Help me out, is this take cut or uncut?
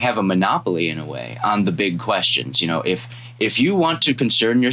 uncut